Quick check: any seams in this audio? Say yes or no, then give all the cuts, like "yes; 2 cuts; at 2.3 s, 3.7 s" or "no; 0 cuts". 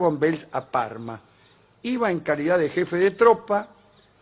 no; 0 cuts